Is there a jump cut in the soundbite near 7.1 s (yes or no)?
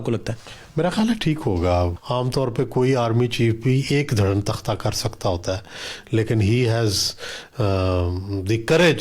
no